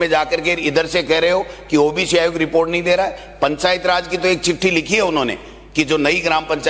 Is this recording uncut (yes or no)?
yes